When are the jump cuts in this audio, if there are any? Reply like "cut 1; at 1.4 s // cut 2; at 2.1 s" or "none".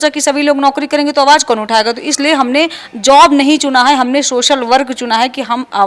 none

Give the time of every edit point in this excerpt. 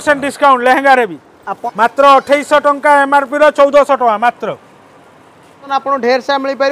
cut 1; at 1.9 s // cut 2; at 5.6 s

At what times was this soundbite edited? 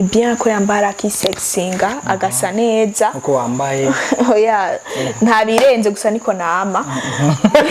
none

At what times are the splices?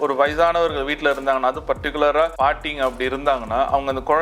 cut 1; at 2.3 s

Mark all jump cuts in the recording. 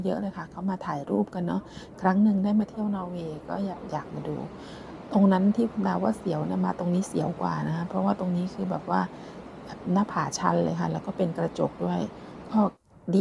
none

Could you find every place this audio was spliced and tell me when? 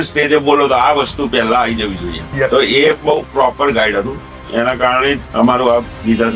cut 1; at 2.2 s // cut 2; at 5.3 s

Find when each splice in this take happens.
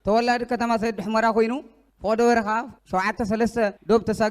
cut 1; at 2.8 s

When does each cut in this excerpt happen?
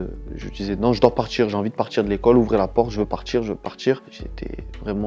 cut 1; at 4.1 s

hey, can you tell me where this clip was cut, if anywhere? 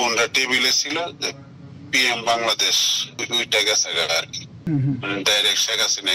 cut 1; at 3.2 s // cut 2; at 4.7 s

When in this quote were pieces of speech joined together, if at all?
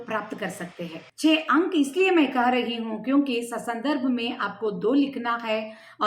cut 1; at 1.1 s

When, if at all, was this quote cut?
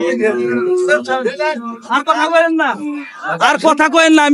none

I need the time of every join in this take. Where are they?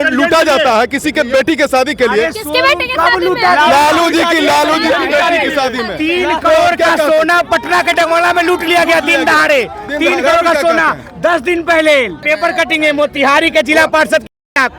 cut 1; at 12.2 s

